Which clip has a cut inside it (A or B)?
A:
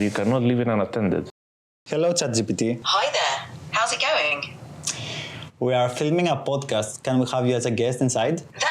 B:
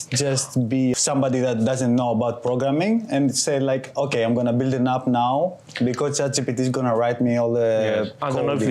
A